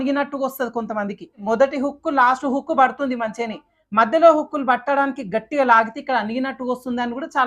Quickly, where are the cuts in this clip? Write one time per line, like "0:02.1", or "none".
0:01.4